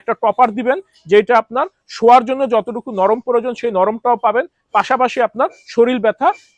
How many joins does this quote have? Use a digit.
0